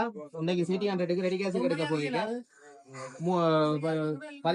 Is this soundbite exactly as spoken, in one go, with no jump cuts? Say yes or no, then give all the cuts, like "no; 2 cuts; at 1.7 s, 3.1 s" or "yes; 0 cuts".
yes; 0 cuts